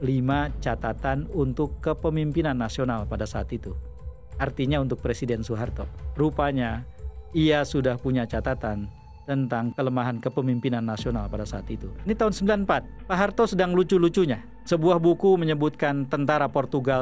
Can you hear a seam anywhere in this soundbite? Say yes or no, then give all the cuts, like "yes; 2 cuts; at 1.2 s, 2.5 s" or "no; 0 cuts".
yes; 3 cuts; at 5.9 s, 12.1 s, 14.5 s